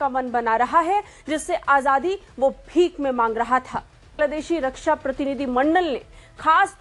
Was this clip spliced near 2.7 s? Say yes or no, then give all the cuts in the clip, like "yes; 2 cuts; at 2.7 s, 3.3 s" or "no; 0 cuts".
no; 1 cut; at 4.1 s